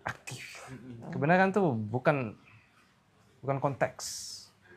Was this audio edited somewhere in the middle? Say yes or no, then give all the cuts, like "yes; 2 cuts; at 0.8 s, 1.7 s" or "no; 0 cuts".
yes; 1 cut; at 1.0 s